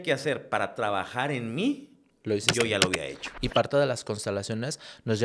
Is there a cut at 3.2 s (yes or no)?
yes